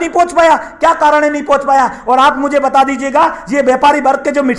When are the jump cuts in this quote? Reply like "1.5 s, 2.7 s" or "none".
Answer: none